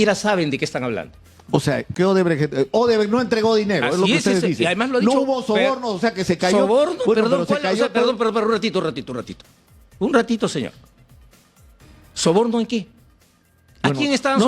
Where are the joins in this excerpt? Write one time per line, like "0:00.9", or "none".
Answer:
0:01.9